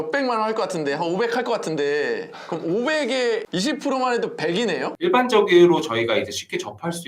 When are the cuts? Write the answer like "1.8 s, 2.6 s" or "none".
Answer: 5.0 s